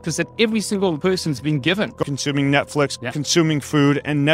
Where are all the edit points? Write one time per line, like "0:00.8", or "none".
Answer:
0:01.0
0:02.1
0:03.0